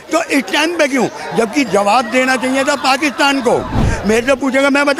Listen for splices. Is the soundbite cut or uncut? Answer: cut